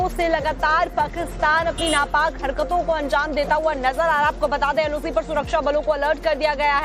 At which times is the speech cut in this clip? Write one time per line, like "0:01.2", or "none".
0:00.9